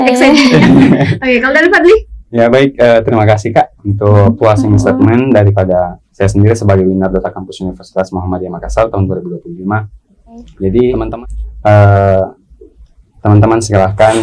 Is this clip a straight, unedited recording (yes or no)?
no